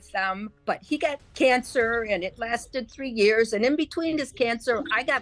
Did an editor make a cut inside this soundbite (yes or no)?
yes